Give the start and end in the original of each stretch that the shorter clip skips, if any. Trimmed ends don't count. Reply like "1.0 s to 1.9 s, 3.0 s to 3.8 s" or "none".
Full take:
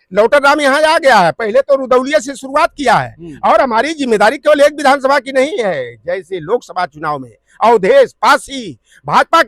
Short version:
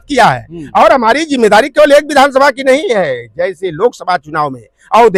none

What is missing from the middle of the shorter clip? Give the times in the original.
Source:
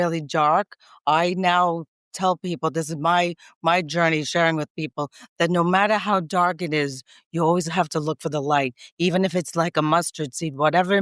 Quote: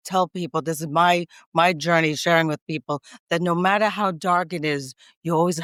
none

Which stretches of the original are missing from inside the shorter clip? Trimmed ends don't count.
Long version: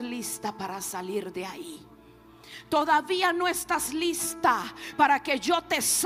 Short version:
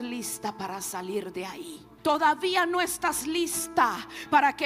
1.8 s to 2.5 s

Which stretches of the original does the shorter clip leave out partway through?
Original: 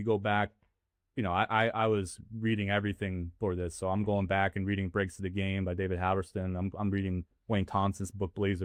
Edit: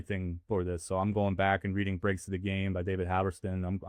none

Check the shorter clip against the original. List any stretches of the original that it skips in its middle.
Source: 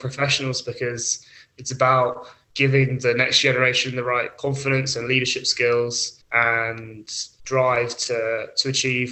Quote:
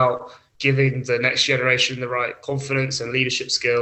none

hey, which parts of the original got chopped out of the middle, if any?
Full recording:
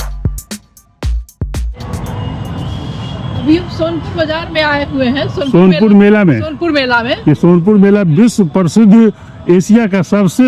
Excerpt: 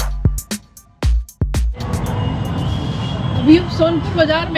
none

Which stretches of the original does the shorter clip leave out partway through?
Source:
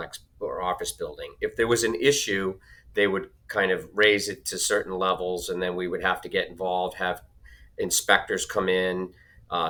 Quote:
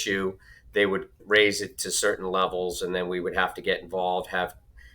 3.4 s to 3.9 s

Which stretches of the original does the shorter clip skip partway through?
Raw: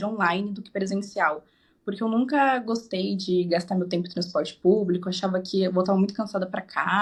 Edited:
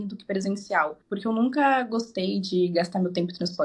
1.4 s to 1.7 s

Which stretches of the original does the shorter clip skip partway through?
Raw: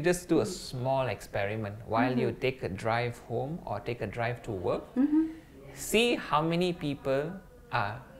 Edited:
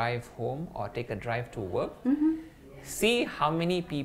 none

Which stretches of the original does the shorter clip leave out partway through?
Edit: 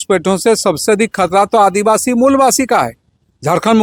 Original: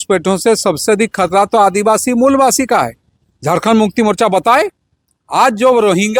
none

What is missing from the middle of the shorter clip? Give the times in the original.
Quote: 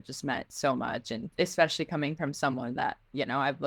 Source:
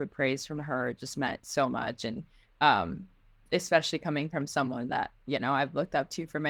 2.1 s to 3.3 s

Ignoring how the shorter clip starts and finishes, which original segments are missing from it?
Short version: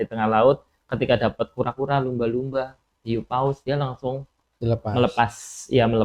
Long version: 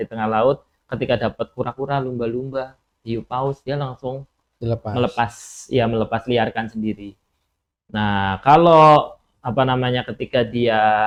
none

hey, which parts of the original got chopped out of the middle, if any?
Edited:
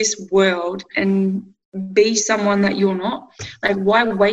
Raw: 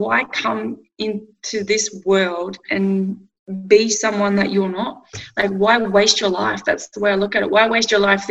none

